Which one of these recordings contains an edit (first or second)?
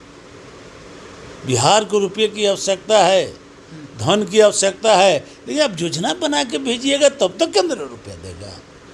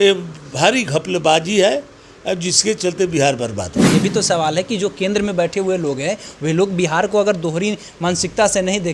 second